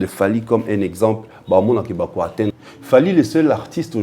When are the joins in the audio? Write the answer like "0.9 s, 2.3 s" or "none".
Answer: 2.6 s